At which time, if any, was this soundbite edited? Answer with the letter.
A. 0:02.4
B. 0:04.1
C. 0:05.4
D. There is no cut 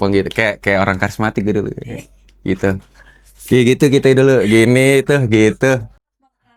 D